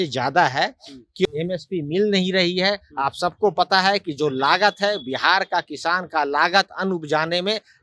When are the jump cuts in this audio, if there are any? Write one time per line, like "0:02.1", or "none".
0:01.3